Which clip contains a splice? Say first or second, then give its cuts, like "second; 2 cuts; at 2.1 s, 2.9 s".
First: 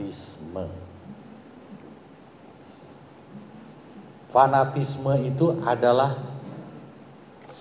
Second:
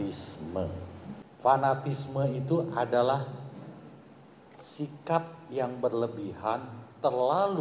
second; 1 cut; at 1.2 s